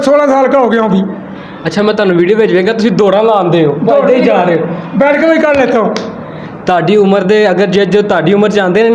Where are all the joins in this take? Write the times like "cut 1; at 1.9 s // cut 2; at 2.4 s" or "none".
none